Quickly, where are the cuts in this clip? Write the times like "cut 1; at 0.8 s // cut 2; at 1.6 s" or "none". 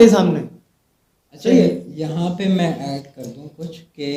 none